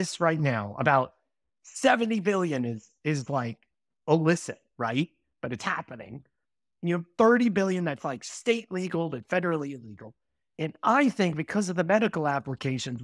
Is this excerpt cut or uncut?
uncut